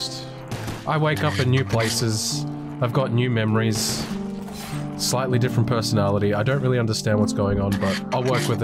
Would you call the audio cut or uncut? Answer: uncut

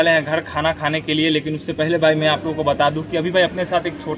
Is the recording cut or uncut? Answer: uncut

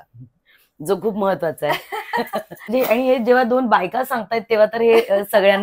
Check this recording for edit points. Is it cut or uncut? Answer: cut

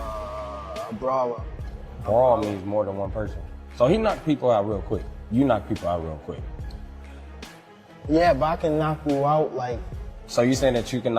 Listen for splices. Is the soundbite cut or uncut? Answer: cut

